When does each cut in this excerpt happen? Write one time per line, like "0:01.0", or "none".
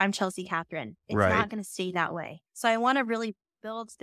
0:02.4